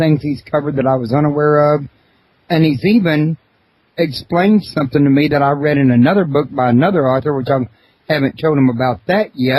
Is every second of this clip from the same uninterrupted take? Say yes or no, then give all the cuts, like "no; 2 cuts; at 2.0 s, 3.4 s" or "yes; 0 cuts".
no; 1 cut; at 5.2 s